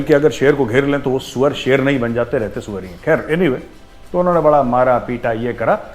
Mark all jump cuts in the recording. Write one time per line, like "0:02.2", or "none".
none